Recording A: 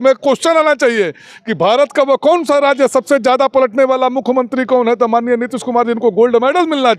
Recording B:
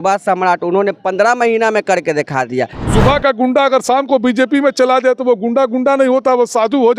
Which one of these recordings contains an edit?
B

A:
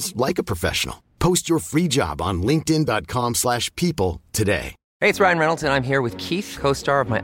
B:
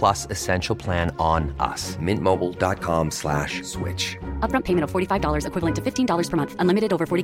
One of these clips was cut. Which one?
A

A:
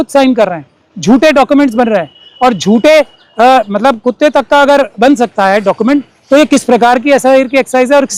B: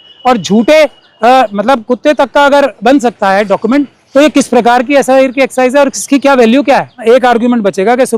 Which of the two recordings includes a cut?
B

